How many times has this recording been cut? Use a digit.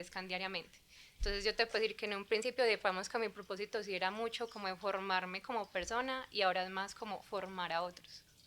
0